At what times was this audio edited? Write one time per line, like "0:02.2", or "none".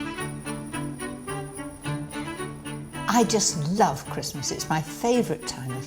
0:03.1

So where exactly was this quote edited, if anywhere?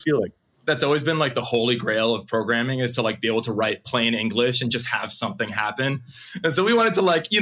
none

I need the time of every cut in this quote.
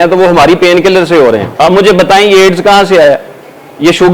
0:01.5

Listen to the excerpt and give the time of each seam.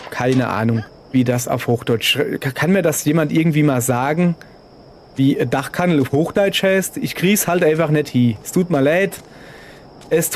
0:01.0

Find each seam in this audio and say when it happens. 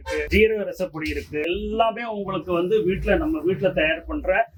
none

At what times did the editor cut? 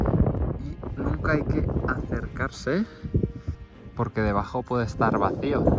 0:03.5

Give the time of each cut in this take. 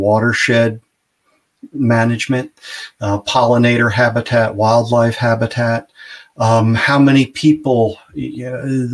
none

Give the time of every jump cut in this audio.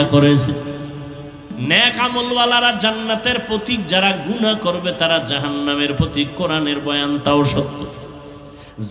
0:01.5

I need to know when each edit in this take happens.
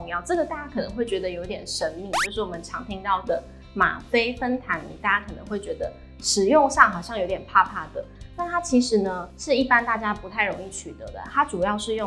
none

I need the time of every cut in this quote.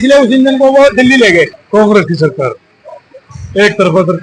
0:01.6

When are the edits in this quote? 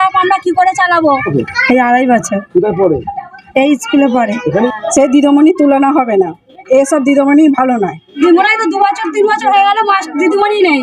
0:01.3
0:04.7
0:08.1

